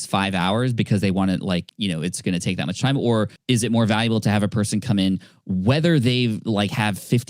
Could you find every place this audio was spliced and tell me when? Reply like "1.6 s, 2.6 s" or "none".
1.7 s, 3.4 s